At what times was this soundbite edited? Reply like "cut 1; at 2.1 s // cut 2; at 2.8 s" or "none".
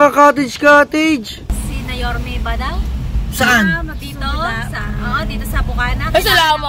cut 1; at 1.5 s